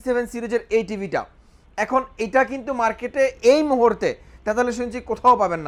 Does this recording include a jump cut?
no; 0 cuts

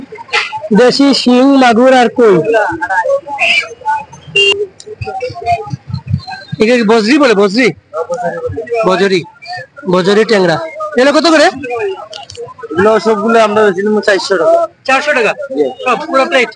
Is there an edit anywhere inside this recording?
yes; 1 cut; at 4.5 s

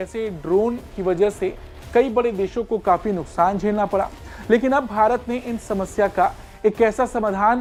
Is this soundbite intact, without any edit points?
yes; 0 cuts

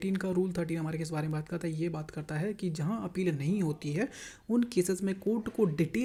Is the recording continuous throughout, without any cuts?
yes; 0 cuts

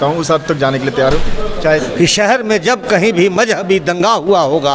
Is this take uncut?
no; 1 cut; at 1.9 s

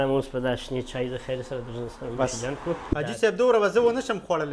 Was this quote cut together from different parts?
yes; 1 cut; at 2.9 s

